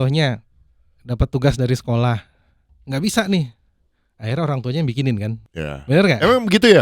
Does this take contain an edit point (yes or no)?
no